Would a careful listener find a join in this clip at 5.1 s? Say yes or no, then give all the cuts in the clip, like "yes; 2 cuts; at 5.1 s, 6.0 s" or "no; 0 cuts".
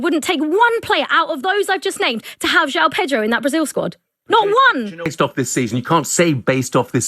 yes; 1 cut; at 5.1 s